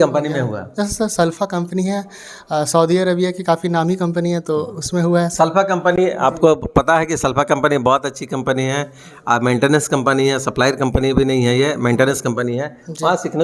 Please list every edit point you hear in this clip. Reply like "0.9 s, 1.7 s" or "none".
none